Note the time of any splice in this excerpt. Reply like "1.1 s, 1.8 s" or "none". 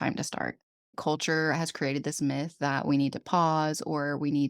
0.9 s

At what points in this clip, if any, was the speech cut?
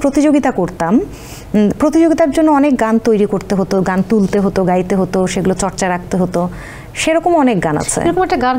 none

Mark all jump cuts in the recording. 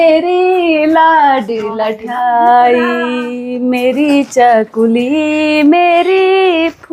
none

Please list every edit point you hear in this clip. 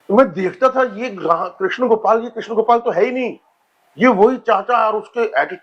none

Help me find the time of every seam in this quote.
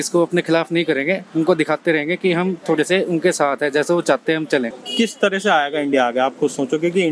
4.8 s

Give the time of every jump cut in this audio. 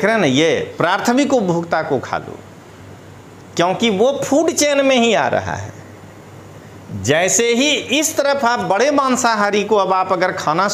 none

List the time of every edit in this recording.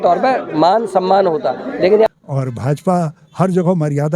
2.1 s

